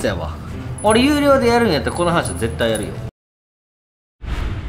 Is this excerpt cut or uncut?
cut